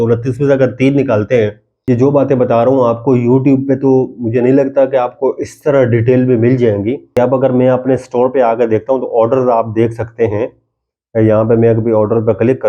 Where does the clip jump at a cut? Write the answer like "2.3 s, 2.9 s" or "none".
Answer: 1.7 s, 7.1 s